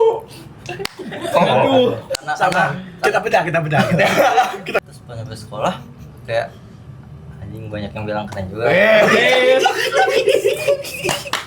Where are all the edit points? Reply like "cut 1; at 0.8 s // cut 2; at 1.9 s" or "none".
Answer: cut 1; at 4.8 s

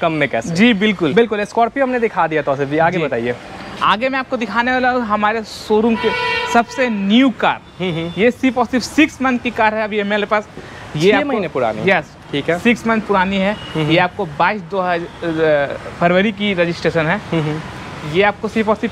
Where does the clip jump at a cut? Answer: none

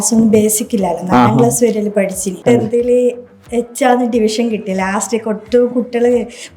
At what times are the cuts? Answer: cut 1; at 2.3 s

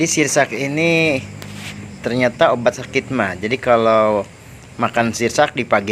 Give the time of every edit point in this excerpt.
none

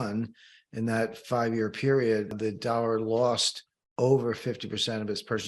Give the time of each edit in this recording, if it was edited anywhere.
cut 1; at 2.3 s

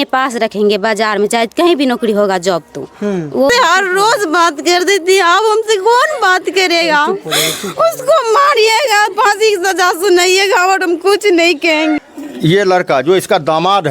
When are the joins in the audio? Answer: cut 1; at 3.5 s // cut 2; at 12.0 s

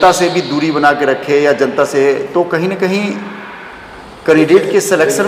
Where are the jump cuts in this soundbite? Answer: none

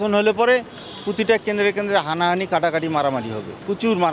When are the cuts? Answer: none

